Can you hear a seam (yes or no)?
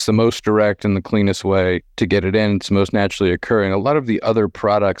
yes